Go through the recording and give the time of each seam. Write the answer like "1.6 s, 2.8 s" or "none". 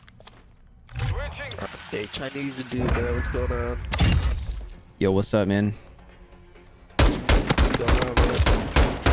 1.7 s